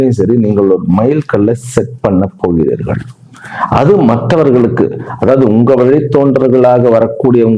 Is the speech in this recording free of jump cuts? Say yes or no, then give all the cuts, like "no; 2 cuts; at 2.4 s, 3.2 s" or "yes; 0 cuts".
yes; 0 cuts